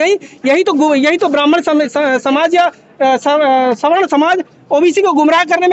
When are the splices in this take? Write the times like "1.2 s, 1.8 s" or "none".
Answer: none